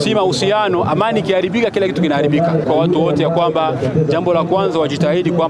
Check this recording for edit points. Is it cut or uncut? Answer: cut